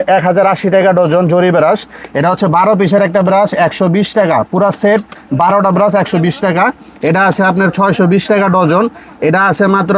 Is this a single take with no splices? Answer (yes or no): yes